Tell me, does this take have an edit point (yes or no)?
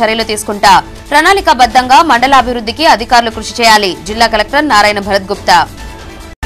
no